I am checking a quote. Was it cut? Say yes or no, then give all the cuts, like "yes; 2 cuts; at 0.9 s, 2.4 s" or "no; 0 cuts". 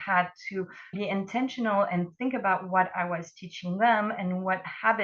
yes; 1 cut; at 1.0 s